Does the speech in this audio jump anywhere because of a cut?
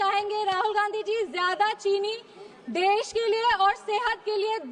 no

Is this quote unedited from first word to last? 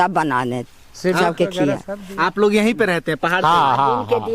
yes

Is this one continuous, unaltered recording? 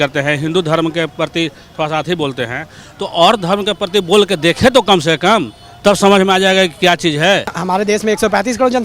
no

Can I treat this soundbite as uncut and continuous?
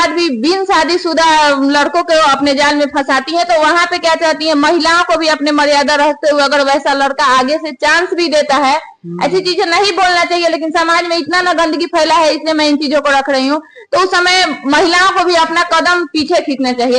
yes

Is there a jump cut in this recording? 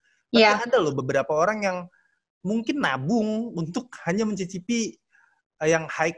no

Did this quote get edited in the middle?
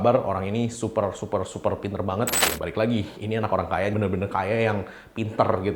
yes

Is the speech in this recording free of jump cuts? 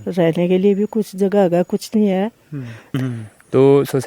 no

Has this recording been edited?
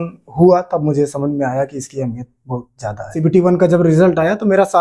yes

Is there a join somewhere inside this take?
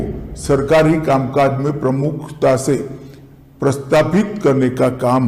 no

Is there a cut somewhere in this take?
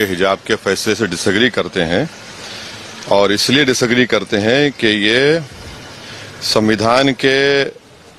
no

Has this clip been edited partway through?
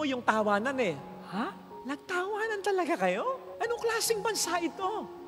no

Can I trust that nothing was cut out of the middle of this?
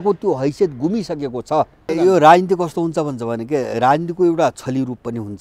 yes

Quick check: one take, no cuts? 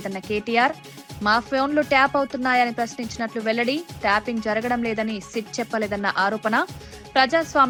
yes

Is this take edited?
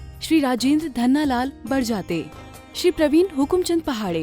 no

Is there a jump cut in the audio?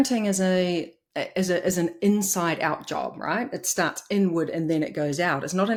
no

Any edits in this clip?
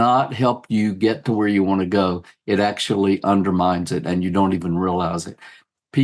no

